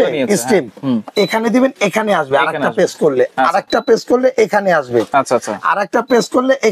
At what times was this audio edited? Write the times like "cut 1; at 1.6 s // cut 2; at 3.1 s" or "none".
none